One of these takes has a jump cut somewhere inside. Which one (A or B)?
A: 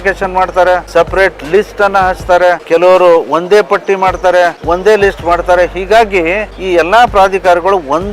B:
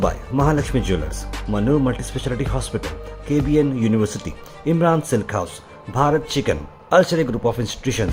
A